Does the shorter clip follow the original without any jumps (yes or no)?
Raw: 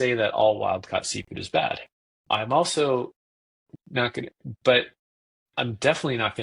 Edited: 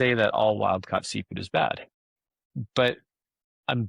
no